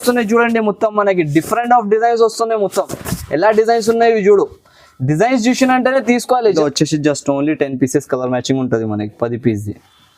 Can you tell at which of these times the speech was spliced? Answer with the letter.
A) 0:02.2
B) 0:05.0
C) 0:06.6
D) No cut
C